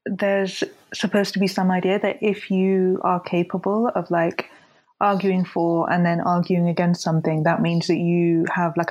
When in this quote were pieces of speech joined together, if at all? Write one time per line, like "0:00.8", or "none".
none